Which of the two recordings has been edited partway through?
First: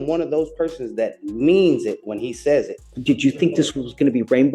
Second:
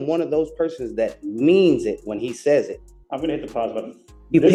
first; 1 cut; at 2.9 s

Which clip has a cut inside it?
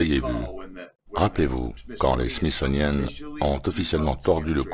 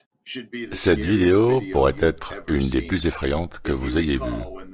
first; 1 cut; at 2.6 s

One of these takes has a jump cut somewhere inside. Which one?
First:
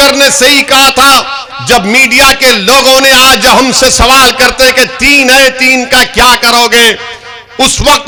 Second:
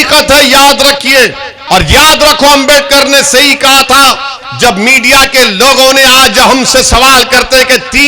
second; 1 cut; at 1.5 s

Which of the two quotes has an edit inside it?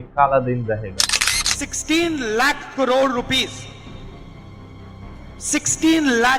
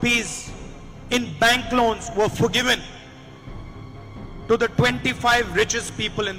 first; 1 cut; at 1.2 s

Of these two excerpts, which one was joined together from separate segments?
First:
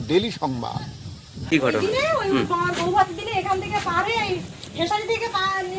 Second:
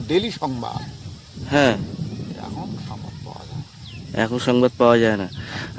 first; 1 cut; at 1.5 s

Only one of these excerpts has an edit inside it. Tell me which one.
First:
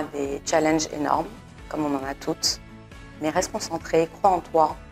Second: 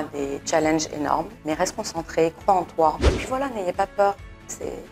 second; 2 cuts; at 1.3 s, 3.1 s

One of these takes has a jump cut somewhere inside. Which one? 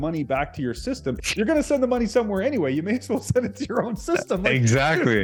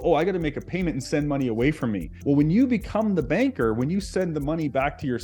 second; 1 cut; at 2.1 s

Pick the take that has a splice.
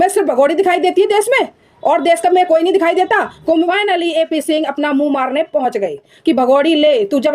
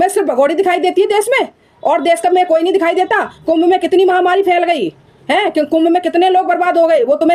first; 2 cuts; at 3.6 s, 6.1 s

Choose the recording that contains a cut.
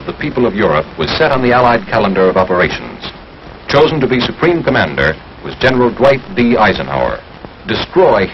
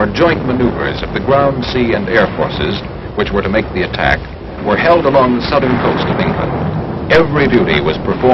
first; 1 cut; at 6.4 s

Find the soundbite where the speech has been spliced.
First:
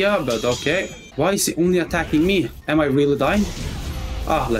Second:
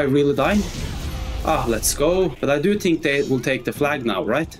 first; 1 cut; at 1.0 s

